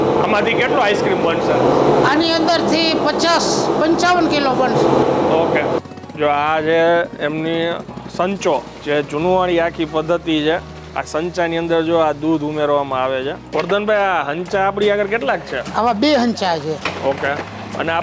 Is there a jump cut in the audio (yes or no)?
yes